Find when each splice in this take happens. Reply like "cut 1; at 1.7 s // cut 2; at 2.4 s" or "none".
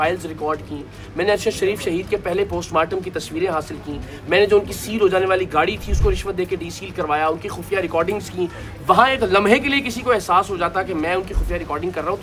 none